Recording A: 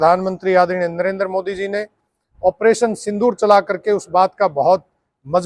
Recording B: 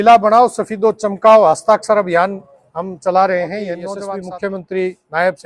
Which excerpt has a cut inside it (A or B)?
B